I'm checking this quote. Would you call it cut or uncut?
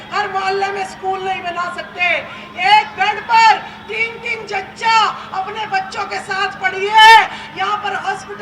uncut